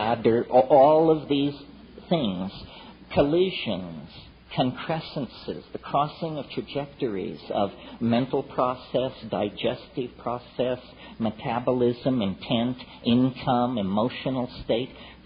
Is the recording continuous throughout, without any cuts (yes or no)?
yes